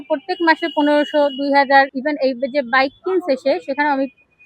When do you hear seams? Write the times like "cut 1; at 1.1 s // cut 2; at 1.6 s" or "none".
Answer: cut 1; at 1.9 s

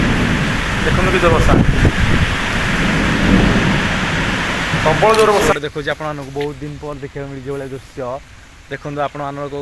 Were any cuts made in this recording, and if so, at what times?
cut 1; at 5.5 s

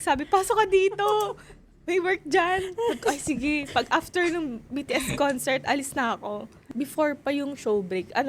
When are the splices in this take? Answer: cut 1; at 6.6 s

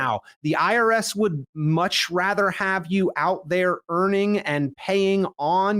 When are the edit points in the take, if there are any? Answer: none

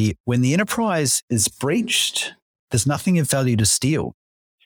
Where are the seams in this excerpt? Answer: cut 1; at 2.6 s

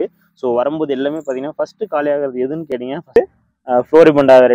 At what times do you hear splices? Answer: cut 1; at 3.2 s

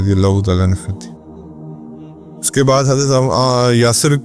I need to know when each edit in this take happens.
cut 1; at 1.3 s // cut 2; at 2.5 s

